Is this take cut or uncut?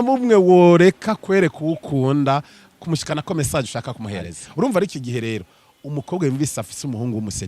cut